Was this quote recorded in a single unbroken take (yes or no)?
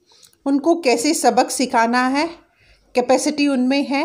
yes